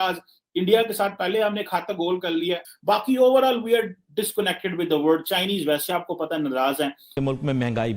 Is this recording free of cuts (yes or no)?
no